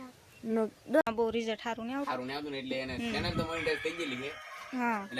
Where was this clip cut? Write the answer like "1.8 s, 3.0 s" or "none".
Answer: 1.0 s